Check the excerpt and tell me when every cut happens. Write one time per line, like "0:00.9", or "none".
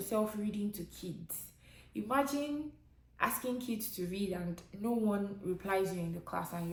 none